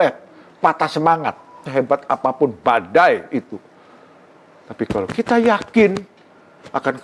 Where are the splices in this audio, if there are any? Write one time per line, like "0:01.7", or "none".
0:01.6